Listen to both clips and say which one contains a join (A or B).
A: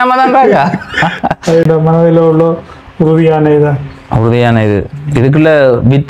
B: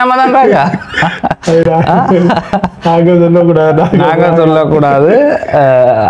A